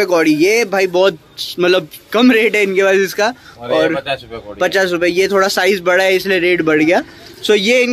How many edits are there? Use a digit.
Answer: 0